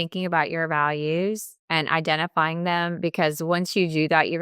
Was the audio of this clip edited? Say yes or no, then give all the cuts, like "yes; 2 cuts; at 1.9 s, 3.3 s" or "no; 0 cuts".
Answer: yes; 1 cut; at 1.5 s